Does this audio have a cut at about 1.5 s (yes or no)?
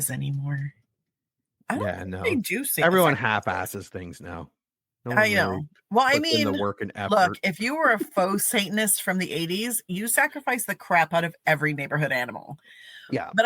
yes